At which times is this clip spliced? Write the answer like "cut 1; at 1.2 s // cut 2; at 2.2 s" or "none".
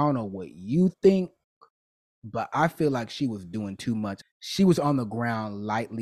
cut 1; at 4.2 s